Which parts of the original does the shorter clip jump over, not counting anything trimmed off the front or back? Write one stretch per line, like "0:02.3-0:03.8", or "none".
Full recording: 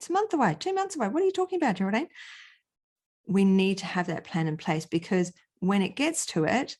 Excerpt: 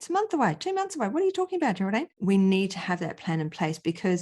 0:02.1-0:03.2